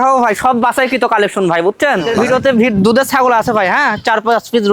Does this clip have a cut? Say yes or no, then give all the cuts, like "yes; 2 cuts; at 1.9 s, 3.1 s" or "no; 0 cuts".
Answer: yes; 1 cut; at 2.1 s